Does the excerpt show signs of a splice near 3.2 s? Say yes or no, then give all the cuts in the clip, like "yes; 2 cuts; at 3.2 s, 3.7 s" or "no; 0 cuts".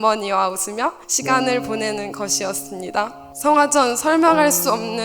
yes; 2 cuts; at 1.1 s, 3.2 s